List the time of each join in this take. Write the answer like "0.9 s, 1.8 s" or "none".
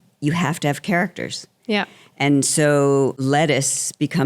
3.2 s